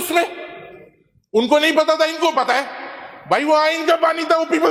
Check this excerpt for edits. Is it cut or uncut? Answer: uncut